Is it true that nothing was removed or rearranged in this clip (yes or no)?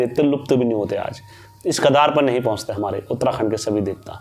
yes